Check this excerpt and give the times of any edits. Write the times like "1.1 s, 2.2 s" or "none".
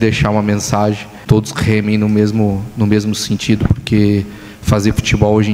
1.3 s